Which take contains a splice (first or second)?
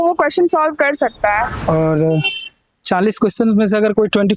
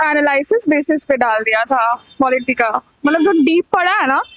first